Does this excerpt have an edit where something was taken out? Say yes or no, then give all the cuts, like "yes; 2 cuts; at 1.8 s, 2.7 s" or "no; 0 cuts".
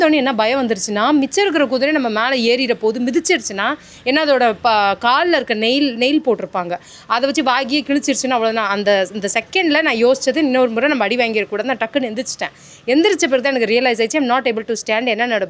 no; 0 cuts